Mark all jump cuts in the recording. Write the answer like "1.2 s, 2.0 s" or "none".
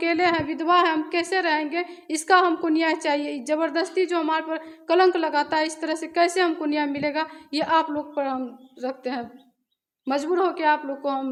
none